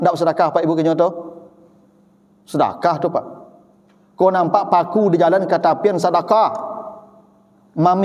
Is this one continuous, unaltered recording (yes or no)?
yes